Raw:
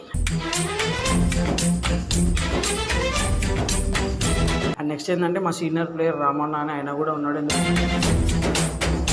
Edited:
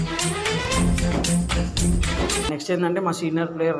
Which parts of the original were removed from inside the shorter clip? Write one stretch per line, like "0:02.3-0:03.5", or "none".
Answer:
0:02.8-0:04.9